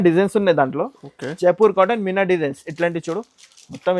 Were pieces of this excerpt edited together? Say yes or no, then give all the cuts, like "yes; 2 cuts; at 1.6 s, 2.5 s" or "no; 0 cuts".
no; 0 cuts